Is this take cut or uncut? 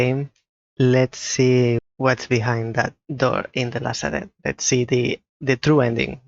cut